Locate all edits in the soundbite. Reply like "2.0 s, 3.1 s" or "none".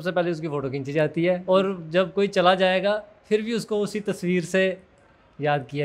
1.4 s